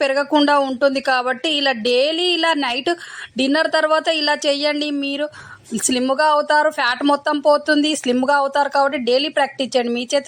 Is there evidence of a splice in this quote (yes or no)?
no